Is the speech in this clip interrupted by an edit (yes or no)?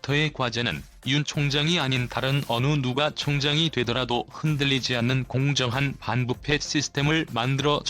yes